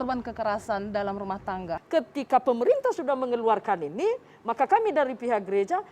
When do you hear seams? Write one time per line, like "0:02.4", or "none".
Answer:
0:01.8